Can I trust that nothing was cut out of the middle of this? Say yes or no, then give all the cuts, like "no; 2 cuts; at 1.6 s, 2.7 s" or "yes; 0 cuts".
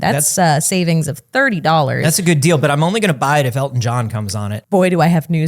no; 1 cut; at 4.5 s